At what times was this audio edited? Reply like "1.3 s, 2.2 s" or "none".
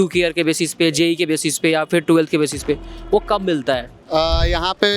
3.9 s